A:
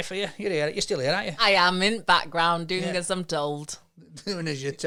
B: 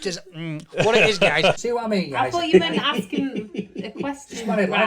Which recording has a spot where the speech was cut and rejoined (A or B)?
B